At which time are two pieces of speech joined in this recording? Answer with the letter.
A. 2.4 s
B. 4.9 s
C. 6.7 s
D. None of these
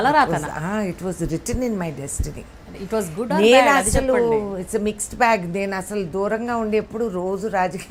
D